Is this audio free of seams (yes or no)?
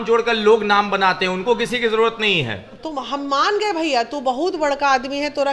yes